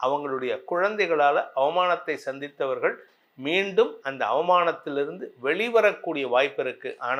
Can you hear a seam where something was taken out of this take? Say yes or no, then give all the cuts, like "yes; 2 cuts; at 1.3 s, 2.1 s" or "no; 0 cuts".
no; 0 cuts